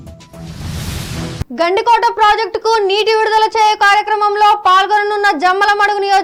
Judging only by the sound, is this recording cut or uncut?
uncut